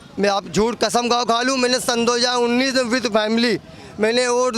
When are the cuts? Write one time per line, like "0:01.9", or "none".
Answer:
none